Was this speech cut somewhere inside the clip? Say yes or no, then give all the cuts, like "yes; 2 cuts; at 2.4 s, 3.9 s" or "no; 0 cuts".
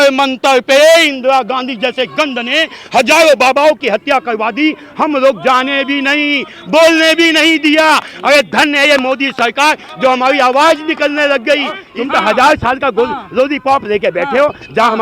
yes; 1 cut; at 11.9 s